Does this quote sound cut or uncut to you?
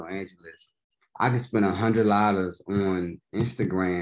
uncut